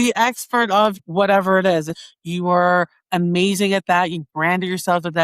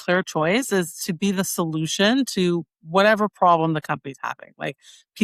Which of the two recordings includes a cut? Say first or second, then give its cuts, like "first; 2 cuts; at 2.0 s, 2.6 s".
first; 2 cuts; at 1.0 s, 2.0 s